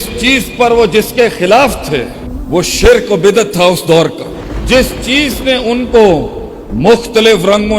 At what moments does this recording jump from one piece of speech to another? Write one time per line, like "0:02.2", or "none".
none